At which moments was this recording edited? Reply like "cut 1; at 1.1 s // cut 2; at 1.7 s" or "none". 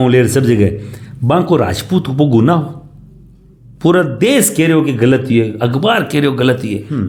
none